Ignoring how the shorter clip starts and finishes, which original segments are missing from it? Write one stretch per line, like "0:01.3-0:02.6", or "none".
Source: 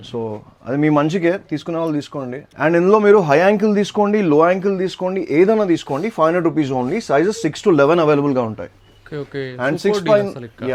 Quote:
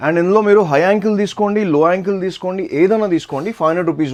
none